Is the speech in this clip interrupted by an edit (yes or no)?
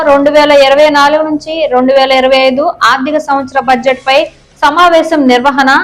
no